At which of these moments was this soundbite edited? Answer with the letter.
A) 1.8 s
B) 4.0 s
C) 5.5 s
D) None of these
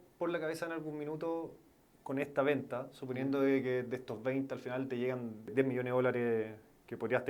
C